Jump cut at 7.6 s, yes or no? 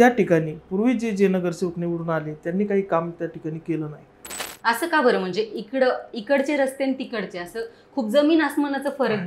no